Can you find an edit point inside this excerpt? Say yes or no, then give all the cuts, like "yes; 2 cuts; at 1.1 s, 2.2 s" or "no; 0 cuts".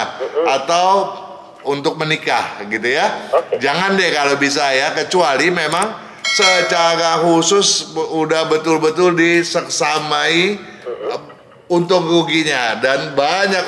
no; 0 cuts